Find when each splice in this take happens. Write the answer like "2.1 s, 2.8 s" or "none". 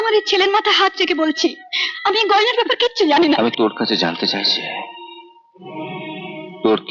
3.4 s

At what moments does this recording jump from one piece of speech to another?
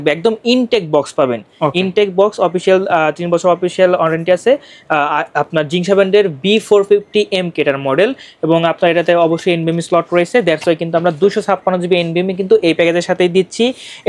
none

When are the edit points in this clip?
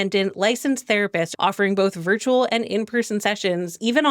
1.3 s

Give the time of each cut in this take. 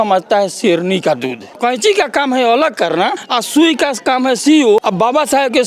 1.5 s, 3.3 s, 4.8 s

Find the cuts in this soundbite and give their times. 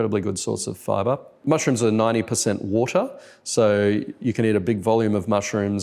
1.4 s

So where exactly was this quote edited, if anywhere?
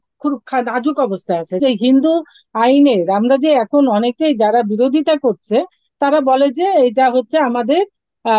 1.6 s

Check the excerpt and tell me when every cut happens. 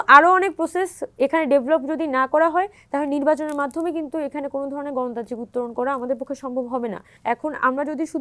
7.1 s

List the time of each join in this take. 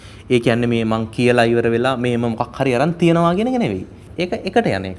4.0 s

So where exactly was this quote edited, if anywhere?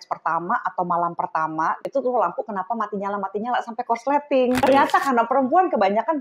1.8 s, 4.6 s

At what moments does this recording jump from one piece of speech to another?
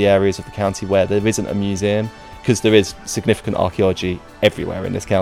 2.4 s

